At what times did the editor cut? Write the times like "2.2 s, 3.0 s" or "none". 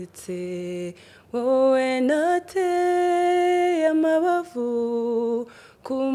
none